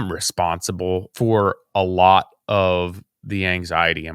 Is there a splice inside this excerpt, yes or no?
yes